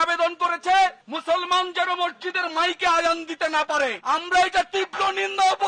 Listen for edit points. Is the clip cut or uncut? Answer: uncut